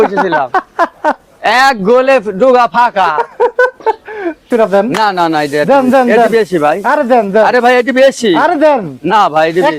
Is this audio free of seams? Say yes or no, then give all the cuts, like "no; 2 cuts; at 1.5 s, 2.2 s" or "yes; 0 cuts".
no; 1 cut; at 4.5 s